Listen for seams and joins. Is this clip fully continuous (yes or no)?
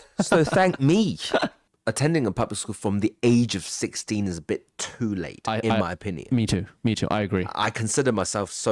no